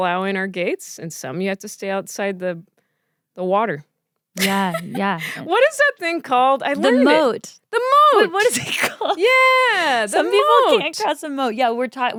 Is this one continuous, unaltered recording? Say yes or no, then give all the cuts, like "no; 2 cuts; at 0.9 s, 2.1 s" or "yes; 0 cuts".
yes; 0 cuts